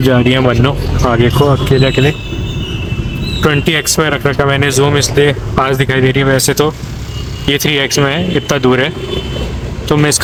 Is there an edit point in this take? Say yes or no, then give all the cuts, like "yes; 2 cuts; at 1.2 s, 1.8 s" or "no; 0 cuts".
no; 0 cuts